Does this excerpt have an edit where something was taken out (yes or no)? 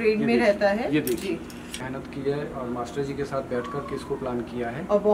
yes